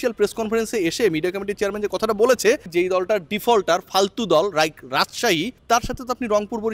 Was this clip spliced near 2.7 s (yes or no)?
yes